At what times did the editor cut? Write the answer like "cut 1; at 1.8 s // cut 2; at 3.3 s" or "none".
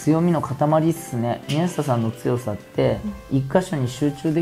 none